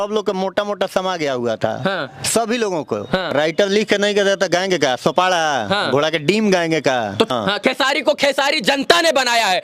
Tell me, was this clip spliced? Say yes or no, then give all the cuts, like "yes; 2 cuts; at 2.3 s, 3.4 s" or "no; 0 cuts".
yes; 2 cuts; at 3.3 s, 7.3 s